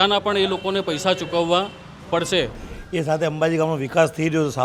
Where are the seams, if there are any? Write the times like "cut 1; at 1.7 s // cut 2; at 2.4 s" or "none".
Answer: cut 1; at 2.6 s